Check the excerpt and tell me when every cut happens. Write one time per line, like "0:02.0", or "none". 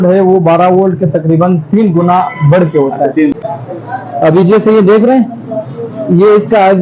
0:03.4